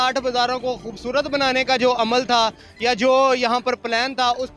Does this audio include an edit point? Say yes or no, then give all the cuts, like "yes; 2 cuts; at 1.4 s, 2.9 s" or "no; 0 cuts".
no; 0 cuts